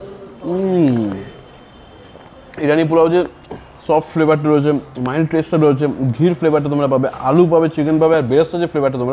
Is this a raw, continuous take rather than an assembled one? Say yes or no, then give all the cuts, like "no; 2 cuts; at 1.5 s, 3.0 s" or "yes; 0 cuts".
yes; 0 cuts